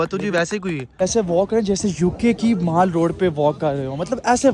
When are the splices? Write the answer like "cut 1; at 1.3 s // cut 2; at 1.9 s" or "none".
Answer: cut 1; at 0.9 s

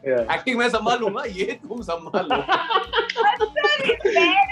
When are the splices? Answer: none

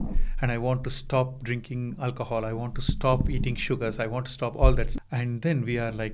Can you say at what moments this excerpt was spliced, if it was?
cut 1; at 4.9 s

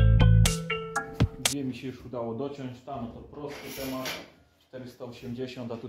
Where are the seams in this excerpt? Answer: cut 1; at 1.0 s

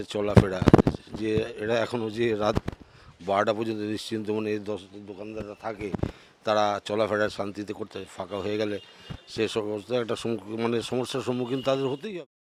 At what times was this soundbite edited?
none

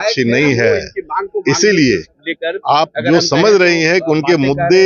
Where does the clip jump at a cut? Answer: none

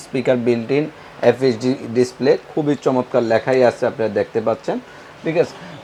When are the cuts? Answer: none

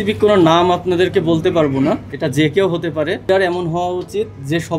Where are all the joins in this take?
cut 1; at 2.0 s // cut 2; at 3.3 s

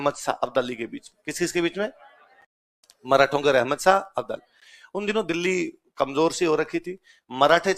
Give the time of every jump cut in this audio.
none

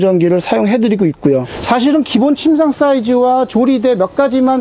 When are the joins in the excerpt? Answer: cut 1; at 1.5 s

